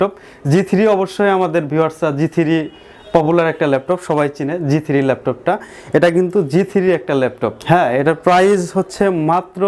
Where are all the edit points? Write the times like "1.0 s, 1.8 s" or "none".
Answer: 7.5 s